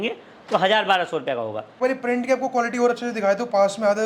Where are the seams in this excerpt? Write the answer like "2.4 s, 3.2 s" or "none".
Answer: 1.8 s